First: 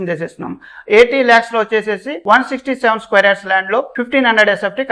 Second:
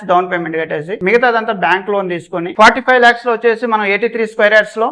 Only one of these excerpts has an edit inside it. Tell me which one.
second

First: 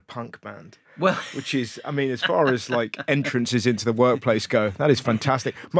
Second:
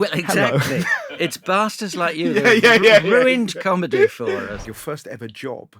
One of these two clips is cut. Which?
second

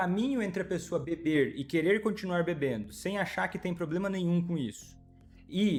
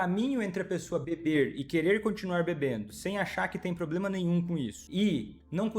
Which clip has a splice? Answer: second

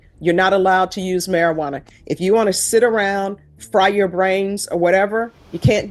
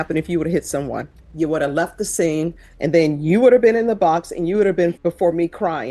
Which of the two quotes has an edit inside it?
second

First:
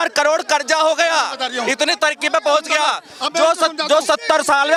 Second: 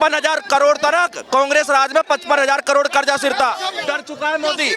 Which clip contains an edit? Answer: second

